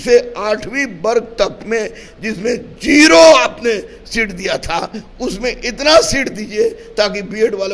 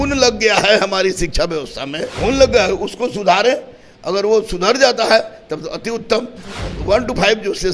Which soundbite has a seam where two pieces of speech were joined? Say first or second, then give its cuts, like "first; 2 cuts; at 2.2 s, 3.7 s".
second; 2 cuts; at 2.1 s, 6.5 s